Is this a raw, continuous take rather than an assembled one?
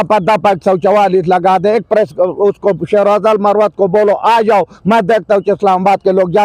yes; 0 cuts

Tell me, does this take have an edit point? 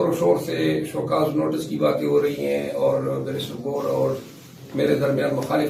no; 0 cuts

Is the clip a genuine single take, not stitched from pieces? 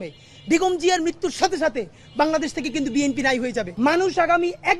no; 1 cut; at 3.7 s

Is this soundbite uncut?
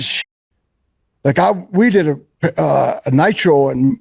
yes; 0 cuts

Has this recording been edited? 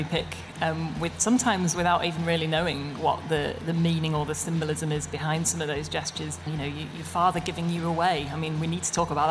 yes; 1 cut; at 6.5 s

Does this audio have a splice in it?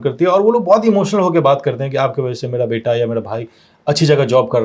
no; 0 cuts

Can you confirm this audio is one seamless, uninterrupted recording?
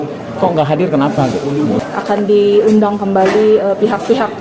no; 1 cut; at 1.8 s

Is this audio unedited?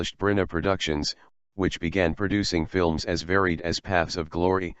yes; 0 cuts

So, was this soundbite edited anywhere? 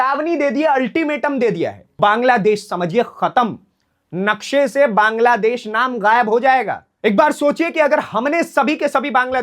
yes; 2 cuts; at 2.0 s, 6.9 s

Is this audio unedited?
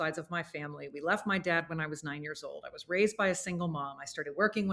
yes; 0 cuts

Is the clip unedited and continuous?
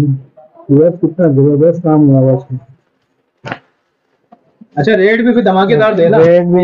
yes; 0 cuts

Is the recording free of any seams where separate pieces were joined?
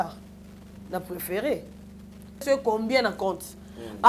no; 1 cut; at 2.4 s

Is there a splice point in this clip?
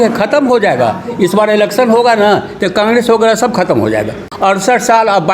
yes; 1 cut; at 4.2 s

